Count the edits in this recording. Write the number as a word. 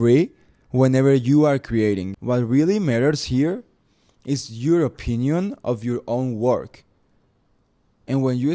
one